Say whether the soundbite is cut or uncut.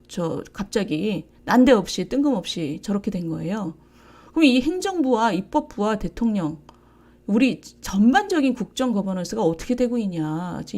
uncut